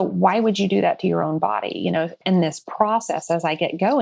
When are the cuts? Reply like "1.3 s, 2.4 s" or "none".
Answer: 2.2 s

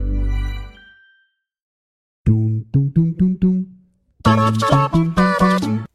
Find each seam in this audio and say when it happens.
1.8 s

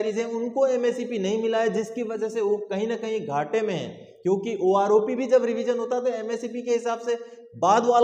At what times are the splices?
none

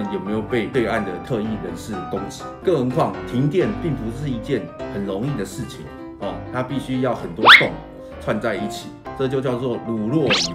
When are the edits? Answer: 2.6 s, 9.0 s

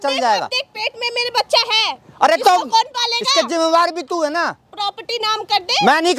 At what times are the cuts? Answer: none

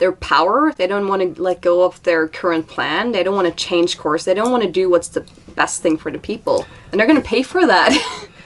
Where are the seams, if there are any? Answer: none

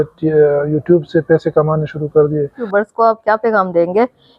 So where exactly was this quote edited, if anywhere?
2.6 s

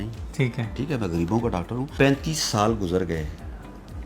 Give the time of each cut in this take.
1.9 s

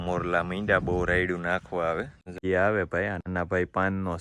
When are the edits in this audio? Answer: 2.4 s

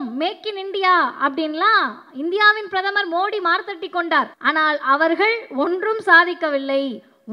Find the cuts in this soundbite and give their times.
4.3 s

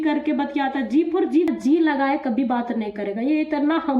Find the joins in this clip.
1.5 s

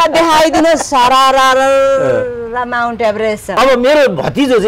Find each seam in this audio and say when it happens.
3.6 s

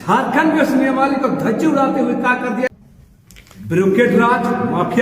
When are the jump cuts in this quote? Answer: 2.7 s

